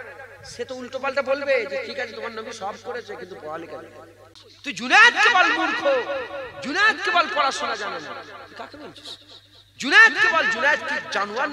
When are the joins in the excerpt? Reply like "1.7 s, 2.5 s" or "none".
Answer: 4.2 s